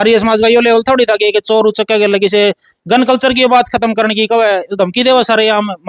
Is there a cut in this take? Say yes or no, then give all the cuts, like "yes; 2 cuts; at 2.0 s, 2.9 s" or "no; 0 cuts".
no; 0 cuts